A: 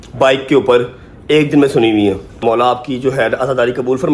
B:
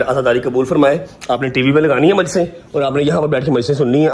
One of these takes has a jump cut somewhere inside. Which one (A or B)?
A